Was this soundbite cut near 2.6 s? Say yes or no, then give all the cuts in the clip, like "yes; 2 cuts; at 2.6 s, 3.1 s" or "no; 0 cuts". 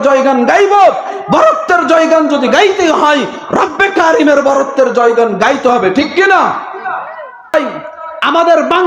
no; 1 cut; at 7.5 s